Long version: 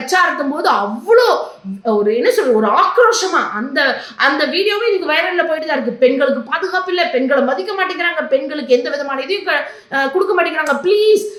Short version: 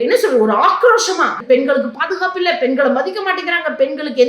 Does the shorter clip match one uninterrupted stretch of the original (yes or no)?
no